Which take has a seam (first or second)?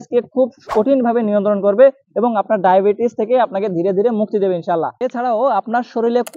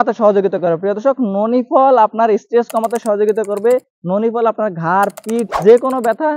first